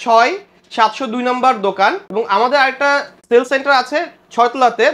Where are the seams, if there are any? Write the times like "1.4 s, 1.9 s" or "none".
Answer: 2.0 s, 3.1 s